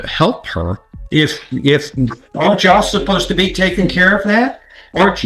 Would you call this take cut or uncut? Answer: cut